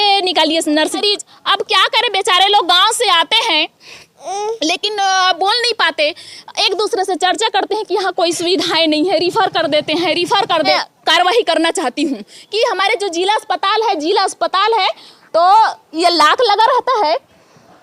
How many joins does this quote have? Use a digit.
2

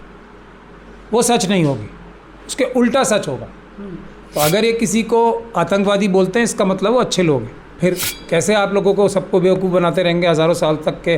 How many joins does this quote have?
1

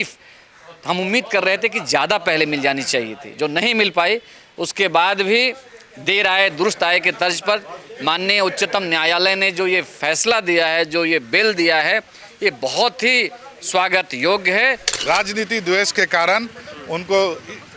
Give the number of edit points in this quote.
1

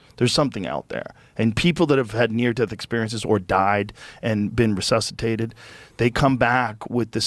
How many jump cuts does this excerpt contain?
0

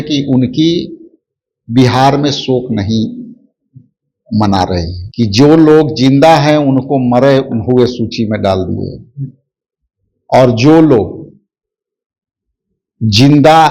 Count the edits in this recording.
1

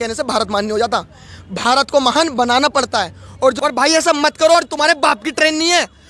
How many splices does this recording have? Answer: 1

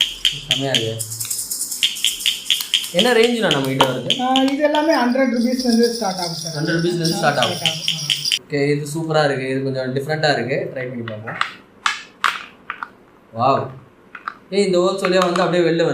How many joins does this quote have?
1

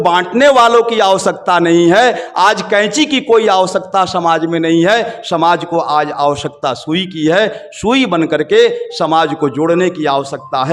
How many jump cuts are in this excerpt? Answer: 0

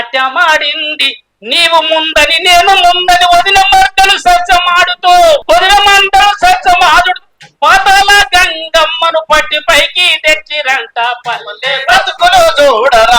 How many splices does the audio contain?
1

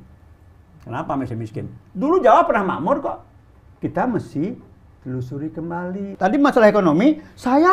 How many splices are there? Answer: 1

